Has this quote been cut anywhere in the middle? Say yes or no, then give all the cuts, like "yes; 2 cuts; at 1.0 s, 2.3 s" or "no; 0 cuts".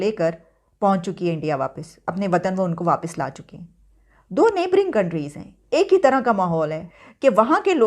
yes; 1 cut; at 6.8 s